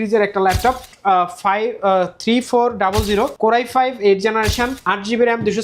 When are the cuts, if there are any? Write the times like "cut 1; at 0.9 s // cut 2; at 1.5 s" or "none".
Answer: cut 1; at 0.9 s // cut 2; at 3.3 s // cut 3; at 4.8 s